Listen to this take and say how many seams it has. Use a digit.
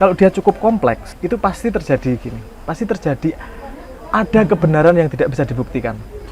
1